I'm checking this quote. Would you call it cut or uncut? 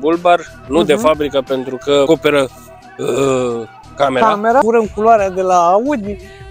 cut